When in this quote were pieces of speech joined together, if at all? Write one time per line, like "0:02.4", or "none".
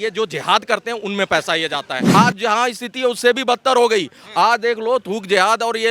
0:02.0